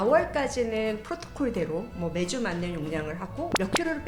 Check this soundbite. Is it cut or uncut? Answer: uncut